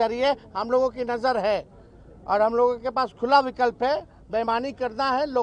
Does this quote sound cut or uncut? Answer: uncut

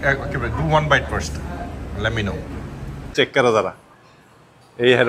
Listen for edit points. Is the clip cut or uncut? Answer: cut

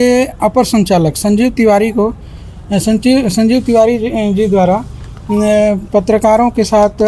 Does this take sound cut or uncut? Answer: uncut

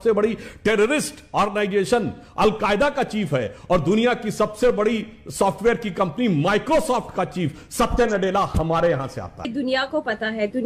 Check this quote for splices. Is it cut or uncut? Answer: cut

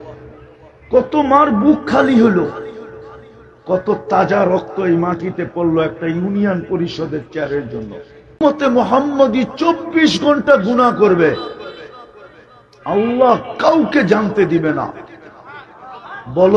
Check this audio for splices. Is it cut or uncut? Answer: cut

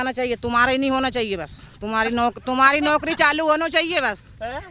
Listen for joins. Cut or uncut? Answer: uncut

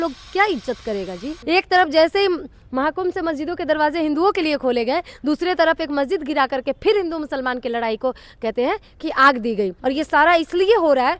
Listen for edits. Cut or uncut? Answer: cut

